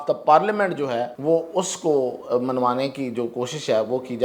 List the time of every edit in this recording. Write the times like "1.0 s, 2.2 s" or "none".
1.1 s